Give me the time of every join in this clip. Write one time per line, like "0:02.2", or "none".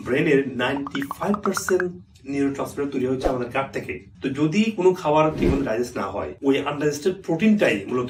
none